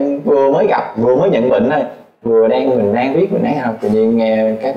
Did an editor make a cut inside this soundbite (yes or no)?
no